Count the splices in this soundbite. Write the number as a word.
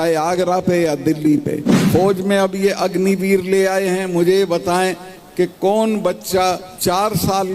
two